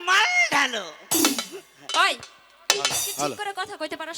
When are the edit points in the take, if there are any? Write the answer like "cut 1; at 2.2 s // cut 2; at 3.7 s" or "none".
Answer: none